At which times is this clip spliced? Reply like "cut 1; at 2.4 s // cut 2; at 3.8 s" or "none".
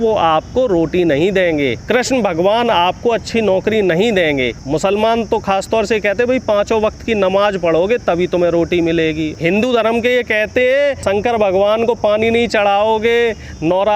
cut 1; at 1.8 s // cut 2; at 4.6 s // cut 3; at 9.3 s // cut 4; at 11.0 s